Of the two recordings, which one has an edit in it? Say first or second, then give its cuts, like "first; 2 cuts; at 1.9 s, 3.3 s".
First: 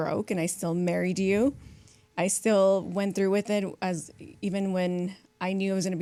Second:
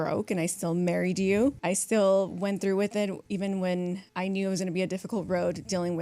second; 3 cuts; at 1.6 s, 3.2 s, 4.1 s